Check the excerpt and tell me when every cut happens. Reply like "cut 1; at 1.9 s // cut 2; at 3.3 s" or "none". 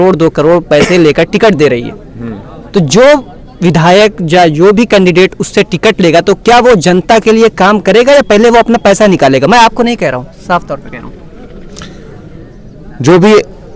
none